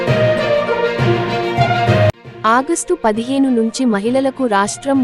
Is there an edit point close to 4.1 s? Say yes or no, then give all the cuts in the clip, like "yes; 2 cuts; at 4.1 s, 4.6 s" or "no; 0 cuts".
no; 1 cut; at 2.1 s